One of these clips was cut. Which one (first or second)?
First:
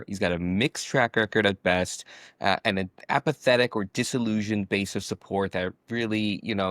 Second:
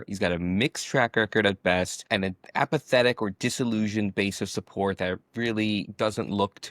second